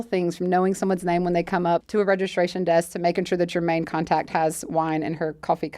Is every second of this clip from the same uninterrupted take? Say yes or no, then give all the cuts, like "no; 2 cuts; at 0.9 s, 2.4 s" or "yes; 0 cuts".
no; 1 cut; at 1.9 s